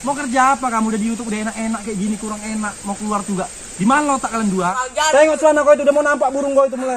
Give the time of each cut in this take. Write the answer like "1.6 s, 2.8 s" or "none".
4.8 s